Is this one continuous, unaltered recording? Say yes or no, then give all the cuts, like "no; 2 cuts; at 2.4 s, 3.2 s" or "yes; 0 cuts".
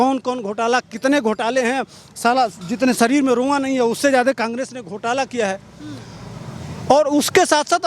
yes; 0 cuts